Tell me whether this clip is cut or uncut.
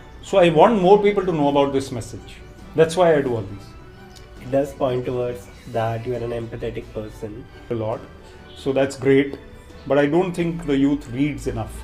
cut